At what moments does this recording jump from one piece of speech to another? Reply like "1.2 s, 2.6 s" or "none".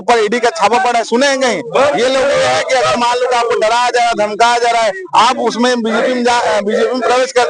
none

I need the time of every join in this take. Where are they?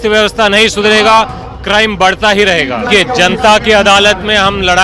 2.9 s

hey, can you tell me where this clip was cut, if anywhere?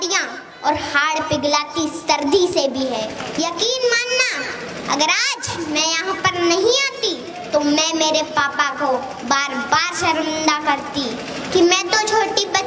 3.2 s

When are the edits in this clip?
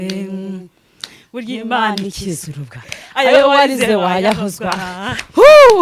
none

